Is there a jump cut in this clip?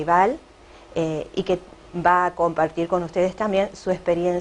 no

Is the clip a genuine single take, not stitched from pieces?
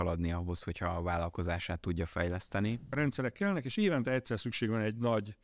no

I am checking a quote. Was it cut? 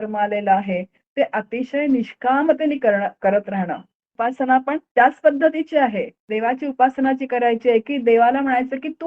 yes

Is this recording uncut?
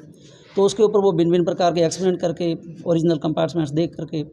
yes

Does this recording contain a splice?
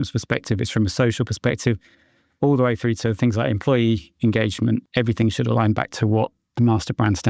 yes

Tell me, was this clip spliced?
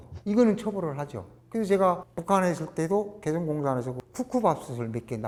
no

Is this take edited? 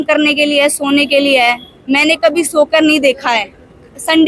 no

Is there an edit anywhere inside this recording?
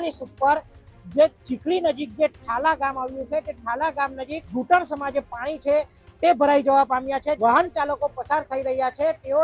yes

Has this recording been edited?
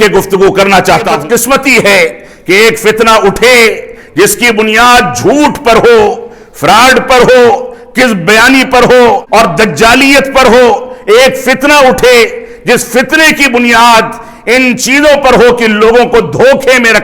yes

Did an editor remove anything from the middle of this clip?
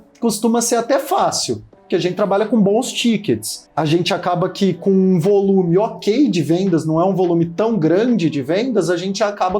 yes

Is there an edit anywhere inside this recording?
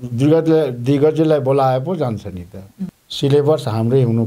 yes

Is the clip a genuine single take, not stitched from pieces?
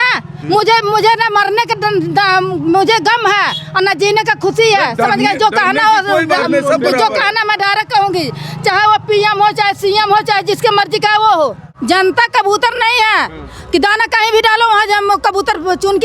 no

